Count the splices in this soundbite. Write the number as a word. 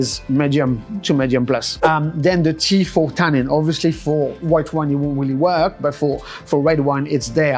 one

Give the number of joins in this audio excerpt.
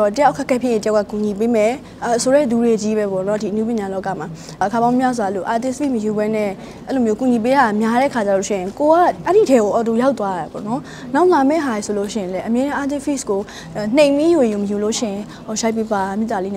two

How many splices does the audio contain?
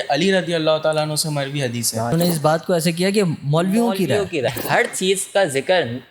two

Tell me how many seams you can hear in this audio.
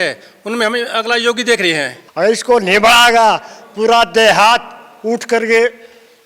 one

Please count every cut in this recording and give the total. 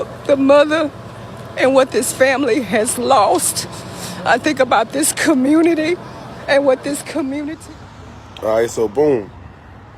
one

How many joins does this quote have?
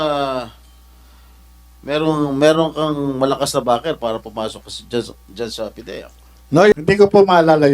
one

